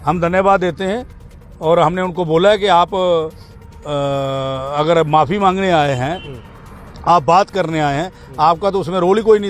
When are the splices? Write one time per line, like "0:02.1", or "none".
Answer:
none